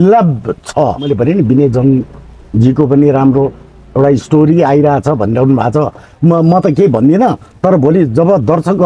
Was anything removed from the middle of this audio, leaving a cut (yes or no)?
yes